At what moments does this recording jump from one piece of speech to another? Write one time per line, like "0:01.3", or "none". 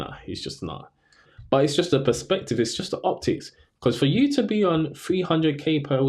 0:01.3